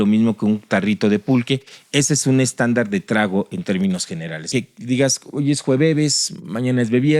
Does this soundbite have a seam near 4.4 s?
yes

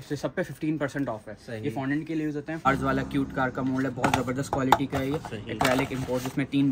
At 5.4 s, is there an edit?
no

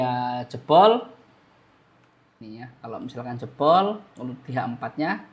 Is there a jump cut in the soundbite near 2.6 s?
yes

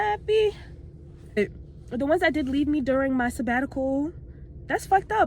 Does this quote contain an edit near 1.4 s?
yes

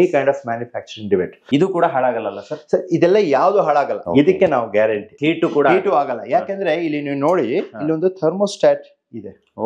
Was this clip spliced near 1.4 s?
yes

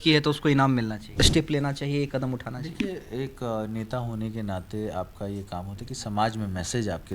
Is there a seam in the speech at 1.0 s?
yes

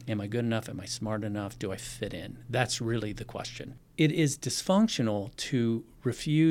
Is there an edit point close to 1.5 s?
no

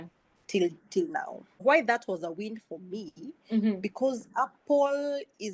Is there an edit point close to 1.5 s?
yes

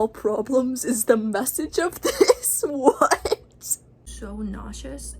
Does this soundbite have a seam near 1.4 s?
no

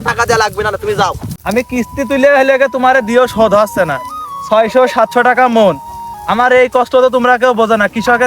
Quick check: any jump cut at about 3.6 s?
no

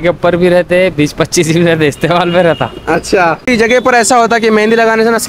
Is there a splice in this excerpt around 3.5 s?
yes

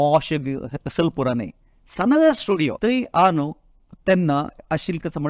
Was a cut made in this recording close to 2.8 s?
yes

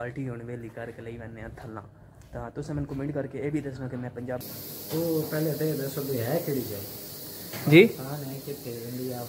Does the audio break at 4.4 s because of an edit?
yes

